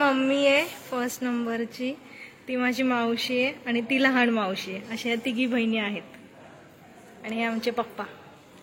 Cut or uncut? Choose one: uncut